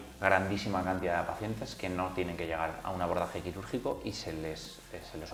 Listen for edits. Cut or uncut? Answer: uncut